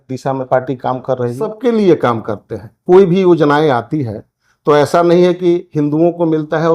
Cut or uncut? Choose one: cut